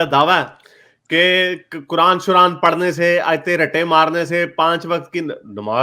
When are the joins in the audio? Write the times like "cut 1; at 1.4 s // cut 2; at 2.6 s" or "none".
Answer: none